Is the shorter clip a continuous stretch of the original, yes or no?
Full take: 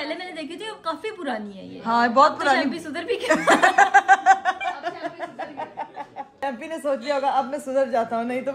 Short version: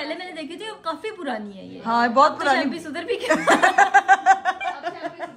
yes